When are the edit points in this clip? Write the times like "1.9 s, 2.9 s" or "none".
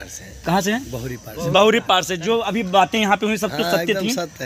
none